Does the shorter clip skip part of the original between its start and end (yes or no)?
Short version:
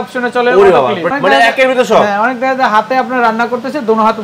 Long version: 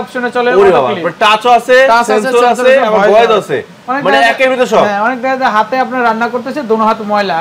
yes